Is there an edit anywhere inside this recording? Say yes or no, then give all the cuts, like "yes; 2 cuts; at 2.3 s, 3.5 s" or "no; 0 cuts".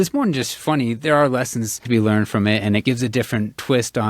yes; 2 cuts; at 1.8 s, 2.8 s